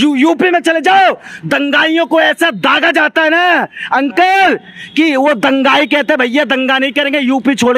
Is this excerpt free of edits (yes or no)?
yes